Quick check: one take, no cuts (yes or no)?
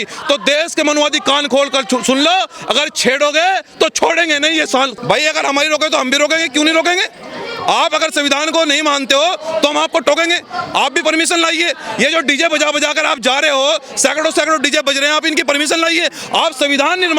no